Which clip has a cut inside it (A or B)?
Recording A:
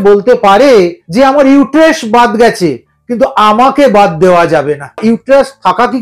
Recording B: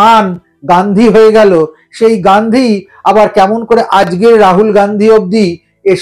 A